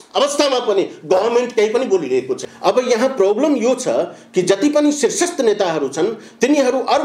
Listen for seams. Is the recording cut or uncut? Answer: cut